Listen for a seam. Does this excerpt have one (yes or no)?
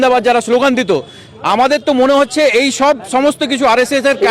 no